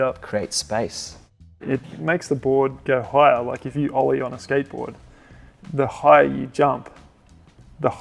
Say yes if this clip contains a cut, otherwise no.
no